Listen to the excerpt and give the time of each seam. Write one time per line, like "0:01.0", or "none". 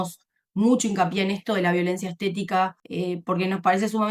0:02.8